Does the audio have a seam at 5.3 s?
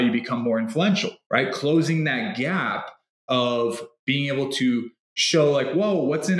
no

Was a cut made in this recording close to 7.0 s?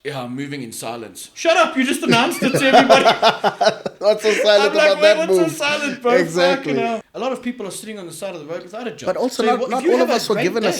yes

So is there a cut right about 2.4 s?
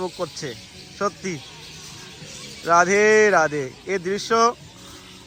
no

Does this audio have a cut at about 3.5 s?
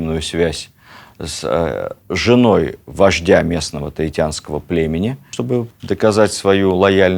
no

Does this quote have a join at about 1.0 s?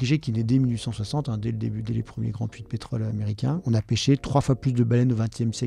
no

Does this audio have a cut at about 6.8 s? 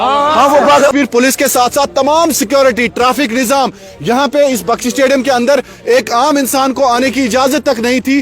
no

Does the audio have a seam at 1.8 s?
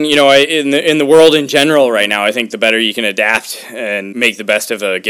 no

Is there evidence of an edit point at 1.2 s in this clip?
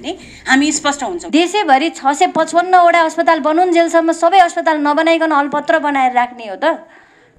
yes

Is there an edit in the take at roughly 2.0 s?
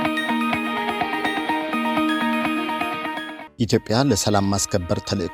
no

